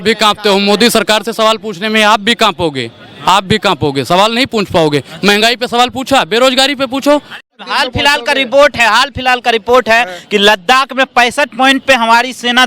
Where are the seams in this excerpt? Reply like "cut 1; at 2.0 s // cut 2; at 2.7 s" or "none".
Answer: cut 1; at 7.5 s